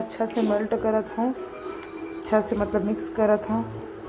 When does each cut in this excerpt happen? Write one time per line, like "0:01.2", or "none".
none